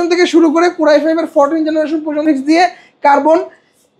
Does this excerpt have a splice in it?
yes; 1 cut; at 2.2 s

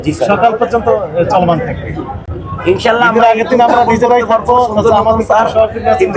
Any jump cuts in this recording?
no; 0 cuts

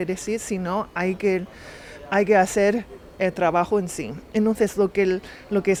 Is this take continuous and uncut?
yes; 0 cuts

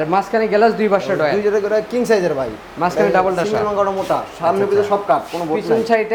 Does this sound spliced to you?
no; 0 cuts

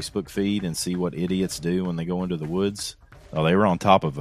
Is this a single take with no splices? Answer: no; 1 cut; at 3.2 s

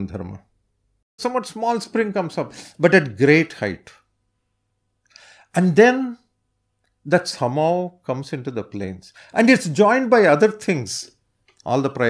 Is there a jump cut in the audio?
yes; 1 cut; at 1.2 s

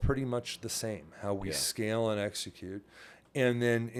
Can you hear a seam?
no; 0 cuts

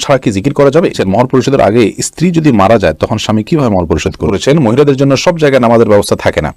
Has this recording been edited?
yes; 2 cuts; at 1.0 s, 4.3 s

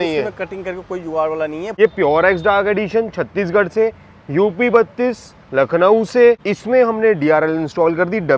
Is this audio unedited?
no; 2 cuts; at 1.6 s, 6.5 s

